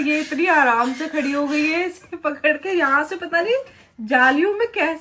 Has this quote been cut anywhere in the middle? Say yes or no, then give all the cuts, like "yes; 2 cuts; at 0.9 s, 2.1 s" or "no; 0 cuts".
no; 0 cuts